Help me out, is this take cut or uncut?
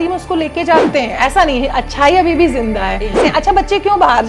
cut